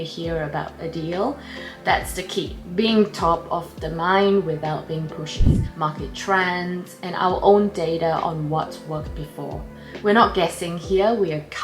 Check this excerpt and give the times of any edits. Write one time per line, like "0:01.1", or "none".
0:05.6

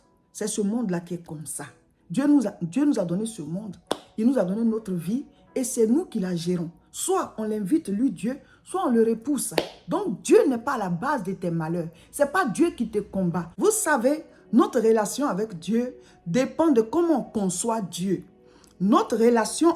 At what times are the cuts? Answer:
0:13.5

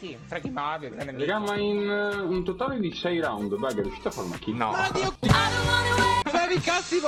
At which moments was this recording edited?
none

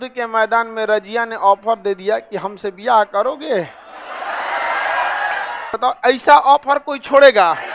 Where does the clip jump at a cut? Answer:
0:05.7

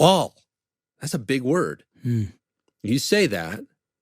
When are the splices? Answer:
0:01.9

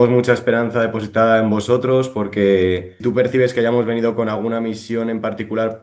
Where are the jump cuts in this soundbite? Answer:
0:02.9

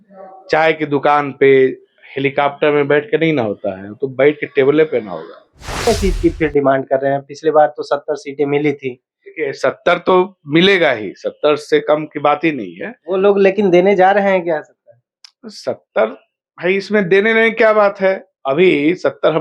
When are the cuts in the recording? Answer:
0:05.9

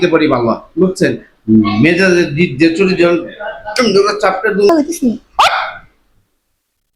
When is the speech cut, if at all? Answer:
0:04.7

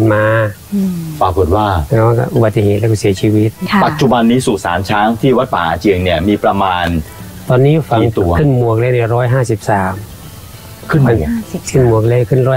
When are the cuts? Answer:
0:03.6

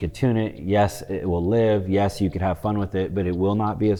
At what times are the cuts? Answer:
none

